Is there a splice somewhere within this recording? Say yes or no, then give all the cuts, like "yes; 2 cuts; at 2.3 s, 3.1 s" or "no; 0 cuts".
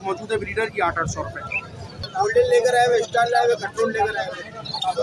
yes; 1 cut; at 2.0 s